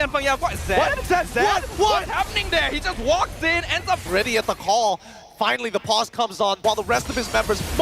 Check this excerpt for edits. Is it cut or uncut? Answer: cut